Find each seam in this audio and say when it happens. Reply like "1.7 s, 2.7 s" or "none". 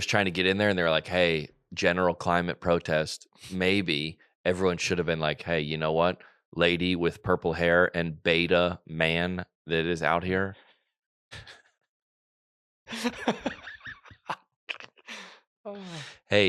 none